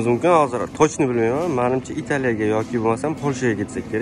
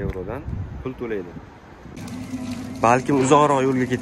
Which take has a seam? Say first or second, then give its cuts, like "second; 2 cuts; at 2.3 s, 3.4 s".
second; 1 cut; at 1.8 s